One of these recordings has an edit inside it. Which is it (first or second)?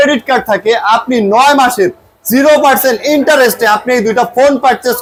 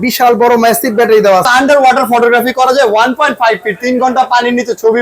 second